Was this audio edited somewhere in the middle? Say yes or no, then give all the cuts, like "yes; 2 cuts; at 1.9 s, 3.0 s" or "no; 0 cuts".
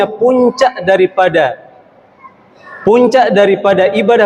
no; 0 cuts